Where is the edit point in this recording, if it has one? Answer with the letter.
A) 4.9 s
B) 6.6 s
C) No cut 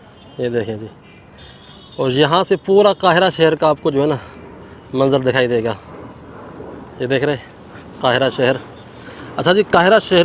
C